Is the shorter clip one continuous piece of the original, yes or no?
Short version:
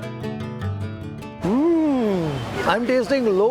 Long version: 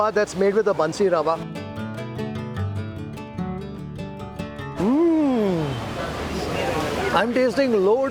no